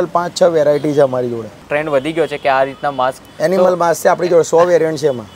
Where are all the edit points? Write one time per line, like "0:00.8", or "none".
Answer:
none